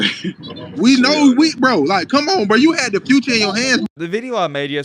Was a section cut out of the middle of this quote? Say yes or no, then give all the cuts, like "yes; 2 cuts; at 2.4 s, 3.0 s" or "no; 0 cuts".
yes; 1 cut; at 3.9 s